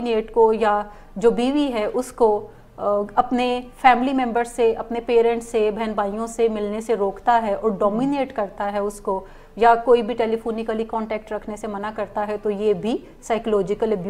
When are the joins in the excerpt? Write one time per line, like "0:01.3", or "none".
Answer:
none